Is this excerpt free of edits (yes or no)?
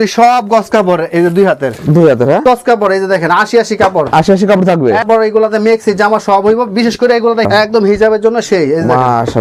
no